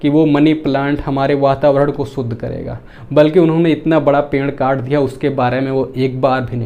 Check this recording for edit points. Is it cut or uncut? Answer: uncut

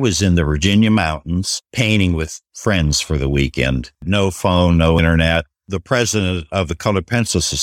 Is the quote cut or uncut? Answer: cut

